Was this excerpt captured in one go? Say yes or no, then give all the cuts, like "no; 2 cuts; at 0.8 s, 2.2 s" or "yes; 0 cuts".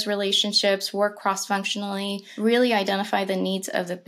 no; 1 cut; at 2.2 s